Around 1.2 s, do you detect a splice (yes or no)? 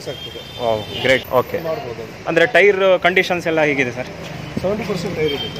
yes